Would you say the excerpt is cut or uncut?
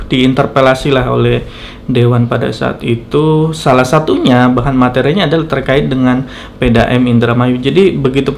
uncut